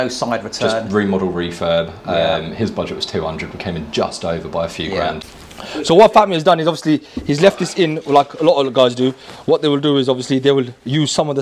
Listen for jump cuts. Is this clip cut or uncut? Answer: cut